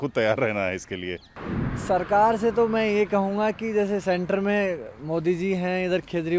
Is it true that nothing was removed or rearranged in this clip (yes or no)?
no